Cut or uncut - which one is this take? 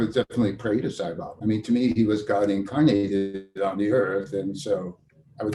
cut